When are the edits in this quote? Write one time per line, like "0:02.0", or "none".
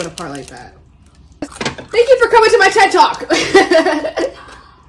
0:01.4